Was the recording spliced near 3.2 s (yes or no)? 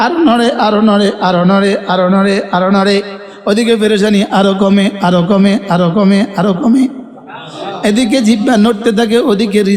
no